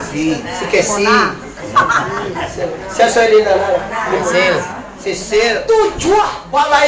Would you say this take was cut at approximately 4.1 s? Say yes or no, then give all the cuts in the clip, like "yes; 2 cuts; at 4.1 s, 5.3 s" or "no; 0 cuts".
no; 1 cut; at 5.6 s